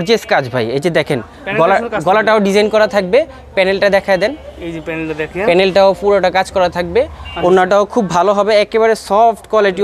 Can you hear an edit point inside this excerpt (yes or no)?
no